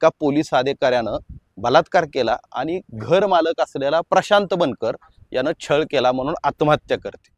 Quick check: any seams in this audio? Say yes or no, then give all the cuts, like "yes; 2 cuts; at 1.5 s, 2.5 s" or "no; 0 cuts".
no; 0 cuts